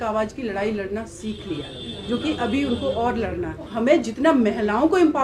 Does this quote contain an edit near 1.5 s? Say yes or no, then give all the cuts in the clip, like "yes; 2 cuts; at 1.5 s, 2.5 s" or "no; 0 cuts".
no; 1 cut; at 3.7 s